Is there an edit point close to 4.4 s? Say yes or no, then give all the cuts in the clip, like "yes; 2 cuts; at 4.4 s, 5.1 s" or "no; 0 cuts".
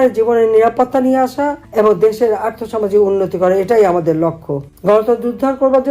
no; 1 cut; at 1.6 s